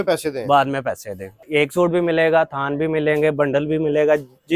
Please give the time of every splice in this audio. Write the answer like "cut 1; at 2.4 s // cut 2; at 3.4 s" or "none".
cut 1; at 1.5 s